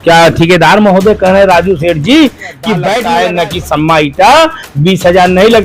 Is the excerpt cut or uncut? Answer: cut